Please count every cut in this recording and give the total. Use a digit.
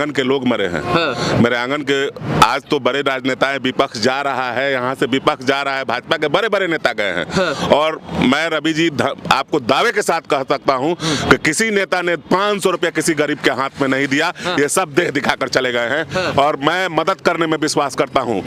0